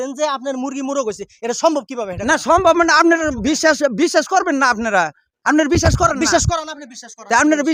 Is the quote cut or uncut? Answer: uncut